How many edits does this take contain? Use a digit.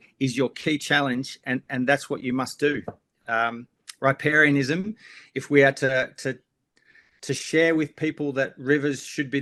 0